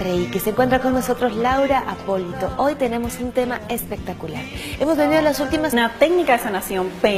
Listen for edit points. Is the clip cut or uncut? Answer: uncut